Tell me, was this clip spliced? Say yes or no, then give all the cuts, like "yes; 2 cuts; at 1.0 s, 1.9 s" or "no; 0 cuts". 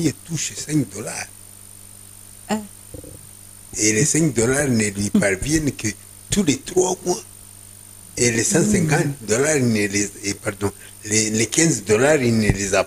no; 0 cuts